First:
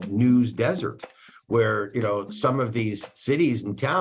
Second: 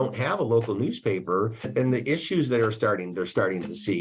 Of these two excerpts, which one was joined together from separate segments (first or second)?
second